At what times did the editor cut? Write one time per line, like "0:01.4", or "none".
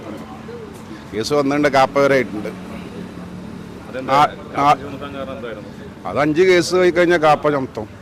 none